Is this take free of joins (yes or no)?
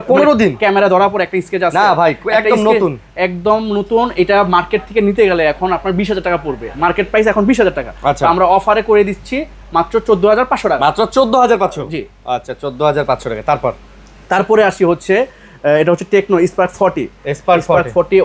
yes